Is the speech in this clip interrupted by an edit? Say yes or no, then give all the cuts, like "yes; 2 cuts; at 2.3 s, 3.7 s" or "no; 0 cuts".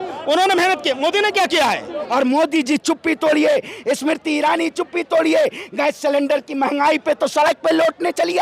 yes; 1 cut; at 2.0 s